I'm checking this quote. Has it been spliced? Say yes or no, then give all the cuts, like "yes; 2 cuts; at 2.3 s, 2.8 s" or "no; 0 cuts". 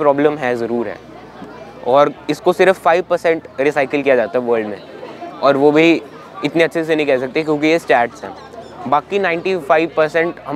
no; 0 cuts